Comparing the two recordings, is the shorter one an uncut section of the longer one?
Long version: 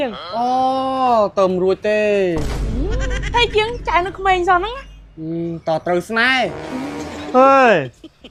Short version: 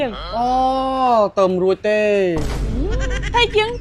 yes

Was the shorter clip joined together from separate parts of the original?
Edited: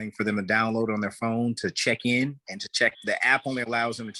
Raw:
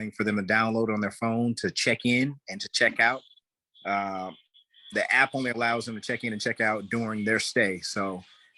yes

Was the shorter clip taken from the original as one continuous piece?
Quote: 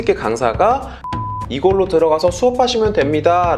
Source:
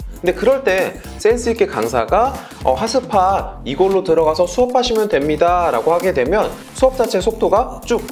no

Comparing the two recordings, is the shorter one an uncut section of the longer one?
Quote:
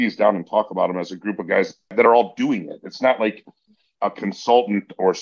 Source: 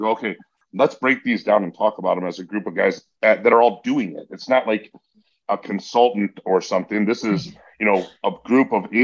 no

